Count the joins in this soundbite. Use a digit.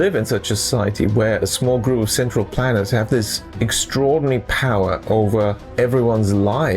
2